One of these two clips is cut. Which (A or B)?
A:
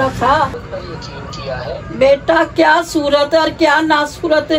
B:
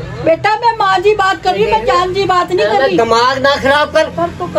A